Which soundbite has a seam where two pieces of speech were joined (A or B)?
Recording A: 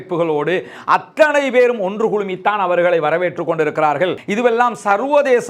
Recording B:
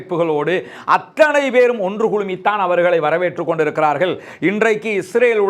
A